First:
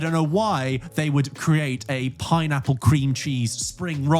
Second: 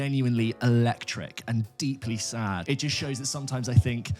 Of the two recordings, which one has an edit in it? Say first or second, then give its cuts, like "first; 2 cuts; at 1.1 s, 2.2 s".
second; 1 cut; at 2.6 s